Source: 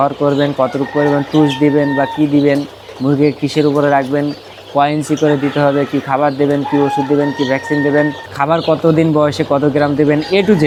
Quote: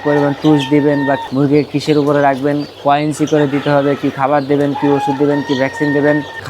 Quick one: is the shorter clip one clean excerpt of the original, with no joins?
no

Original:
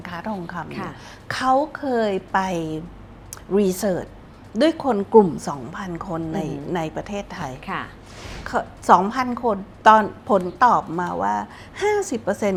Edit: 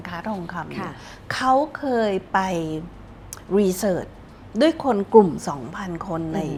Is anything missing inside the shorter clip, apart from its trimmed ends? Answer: no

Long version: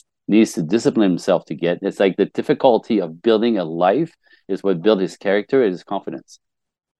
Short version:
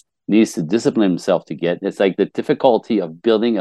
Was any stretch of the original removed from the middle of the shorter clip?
no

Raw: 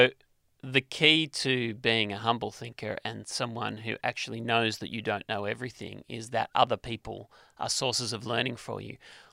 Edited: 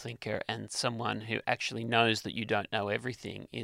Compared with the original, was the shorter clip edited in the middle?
no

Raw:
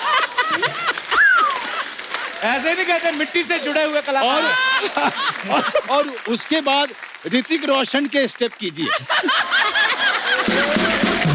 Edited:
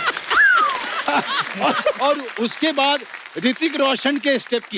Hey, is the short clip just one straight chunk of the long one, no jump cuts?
no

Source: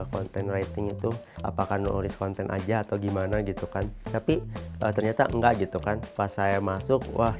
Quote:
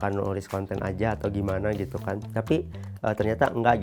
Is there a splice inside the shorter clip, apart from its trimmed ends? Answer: yes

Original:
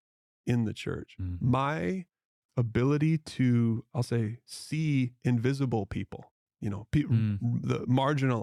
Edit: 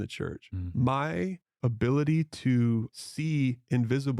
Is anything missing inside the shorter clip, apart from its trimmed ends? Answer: yes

